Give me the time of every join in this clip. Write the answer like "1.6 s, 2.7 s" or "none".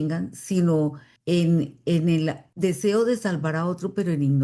1.1 s, 2.4 s